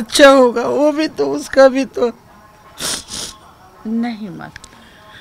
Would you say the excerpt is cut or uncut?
uncut